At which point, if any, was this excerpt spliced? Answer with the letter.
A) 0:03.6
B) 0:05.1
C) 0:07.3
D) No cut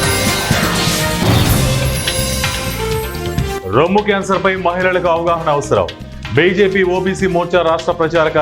D